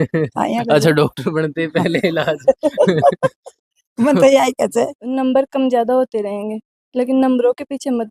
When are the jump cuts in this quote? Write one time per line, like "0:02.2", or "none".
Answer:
0:05.0